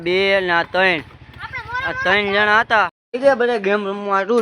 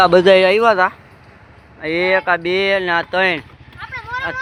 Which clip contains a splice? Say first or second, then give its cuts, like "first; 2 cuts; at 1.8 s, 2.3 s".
first; 1 cut; at 3.0 s